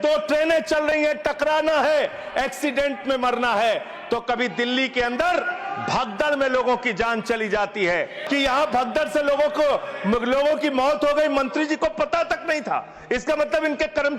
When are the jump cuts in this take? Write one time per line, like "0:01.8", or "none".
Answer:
0:08.2